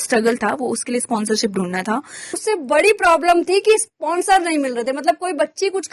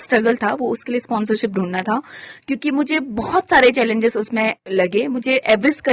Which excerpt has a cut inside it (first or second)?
first